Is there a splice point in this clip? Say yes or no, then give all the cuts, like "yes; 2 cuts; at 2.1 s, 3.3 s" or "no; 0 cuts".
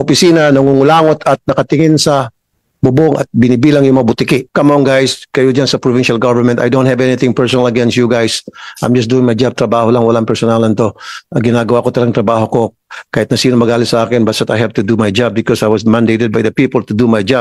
yes; 1 cut; at 4.5 s